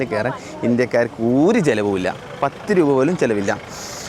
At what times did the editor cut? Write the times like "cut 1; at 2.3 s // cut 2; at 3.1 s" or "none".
none